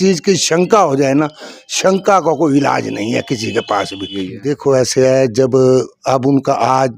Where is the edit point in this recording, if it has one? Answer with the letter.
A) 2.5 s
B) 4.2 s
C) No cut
B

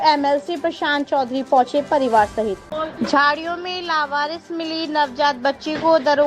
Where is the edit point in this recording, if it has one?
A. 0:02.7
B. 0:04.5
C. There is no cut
A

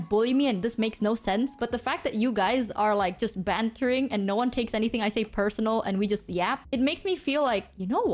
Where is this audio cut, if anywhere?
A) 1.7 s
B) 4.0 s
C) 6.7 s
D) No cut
D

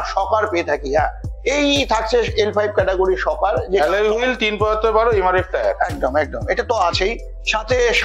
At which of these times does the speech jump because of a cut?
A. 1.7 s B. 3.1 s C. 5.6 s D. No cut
D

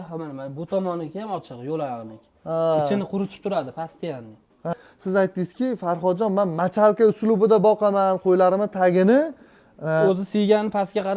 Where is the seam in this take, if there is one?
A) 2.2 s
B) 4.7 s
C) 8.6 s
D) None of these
B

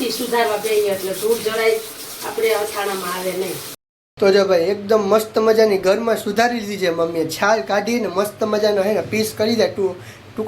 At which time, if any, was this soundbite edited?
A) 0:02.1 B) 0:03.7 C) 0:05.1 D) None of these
B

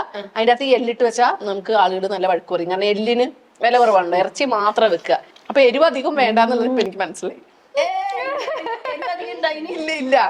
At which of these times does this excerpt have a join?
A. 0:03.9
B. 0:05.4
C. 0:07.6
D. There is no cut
B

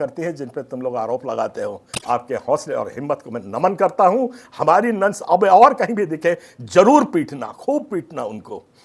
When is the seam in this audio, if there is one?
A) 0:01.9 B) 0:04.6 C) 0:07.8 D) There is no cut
A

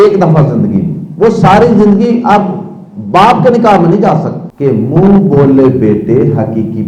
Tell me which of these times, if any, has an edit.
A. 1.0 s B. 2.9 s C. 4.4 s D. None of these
C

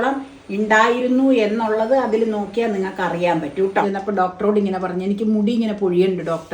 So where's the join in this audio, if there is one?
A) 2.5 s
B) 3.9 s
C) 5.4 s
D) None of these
B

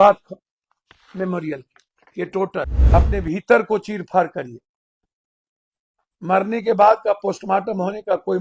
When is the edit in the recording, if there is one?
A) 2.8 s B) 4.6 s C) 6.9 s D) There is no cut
A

